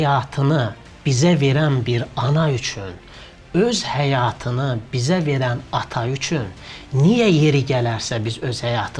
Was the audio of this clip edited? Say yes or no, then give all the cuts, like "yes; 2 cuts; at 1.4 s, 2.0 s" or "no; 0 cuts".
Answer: no; 0 cuts